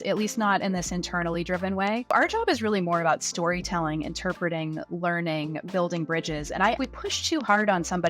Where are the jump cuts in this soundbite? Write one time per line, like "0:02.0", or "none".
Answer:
0:02.1
0:06.8